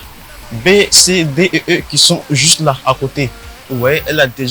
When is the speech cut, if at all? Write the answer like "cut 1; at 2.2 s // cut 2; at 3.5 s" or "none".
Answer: none